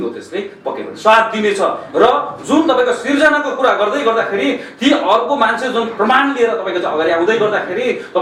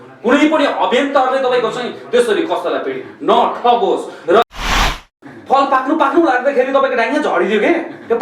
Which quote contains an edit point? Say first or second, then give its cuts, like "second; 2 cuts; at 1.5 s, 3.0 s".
second; 1 cut; at 4.9 s